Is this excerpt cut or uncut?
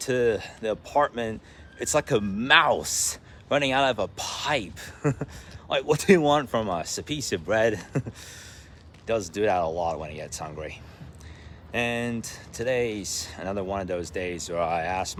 uncut